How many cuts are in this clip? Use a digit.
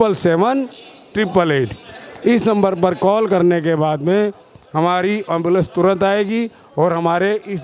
0